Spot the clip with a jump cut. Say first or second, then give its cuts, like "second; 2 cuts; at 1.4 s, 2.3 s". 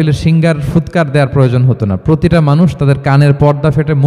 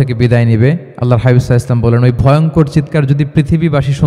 second; 1 cut; at 0.9 s